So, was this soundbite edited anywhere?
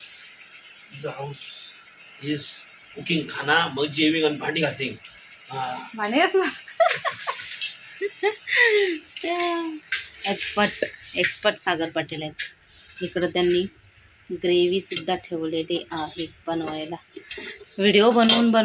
no; 0 cuts

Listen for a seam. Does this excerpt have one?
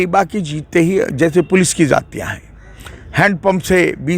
no; 0 cuts

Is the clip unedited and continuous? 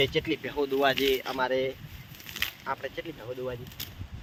yes; 0 cuts

